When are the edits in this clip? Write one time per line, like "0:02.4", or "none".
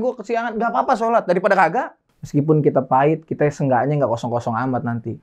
0:01.9

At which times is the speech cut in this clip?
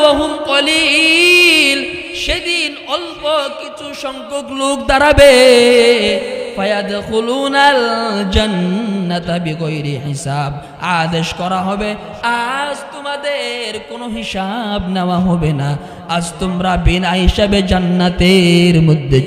none

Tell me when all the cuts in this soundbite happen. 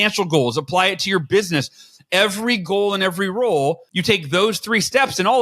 0:03.9

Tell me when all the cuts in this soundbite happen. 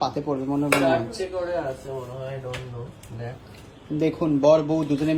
none

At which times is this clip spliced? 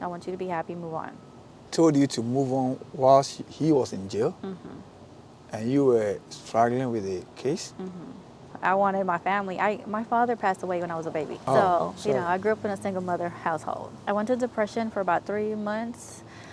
0:01.7
0:08.5
0:11.4
0:13.9

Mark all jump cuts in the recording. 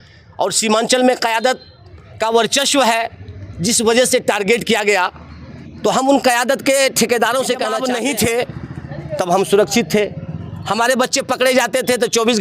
0:07.7

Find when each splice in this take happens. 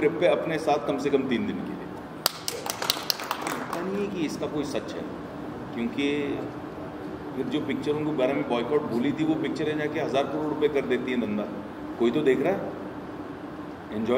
0:03.6

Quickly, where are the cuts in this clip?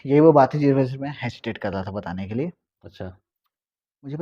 none

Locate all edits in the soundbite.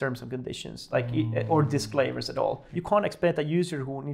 0:02.7

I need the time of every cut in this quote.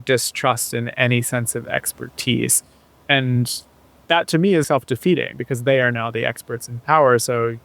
0:04.7

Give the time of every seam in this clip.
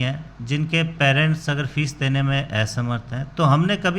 none

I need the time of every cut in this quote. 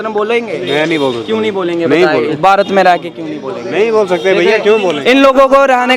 none

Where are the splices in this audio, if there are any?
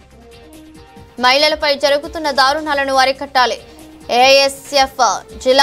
none

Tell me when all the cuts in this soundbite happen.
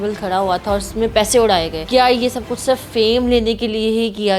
0:01.8

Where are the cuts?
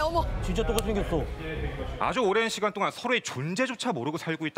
0:01.8

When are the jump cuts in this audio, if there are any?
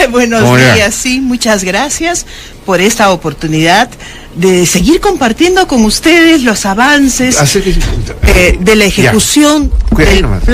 0:01.0

